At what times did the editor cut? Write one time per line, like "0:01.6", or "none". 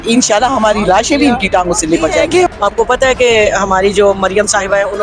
0:02.5